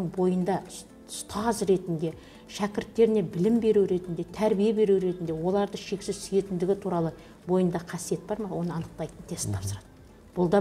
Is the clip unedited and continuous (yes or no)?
yes